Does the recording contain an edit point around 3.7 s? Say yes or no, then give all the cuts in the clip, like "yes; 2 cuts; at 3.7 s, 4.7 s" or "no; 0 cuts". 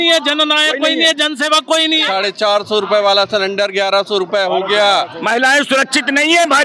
no; 2 cuts; at 2.1 s, 5.2 s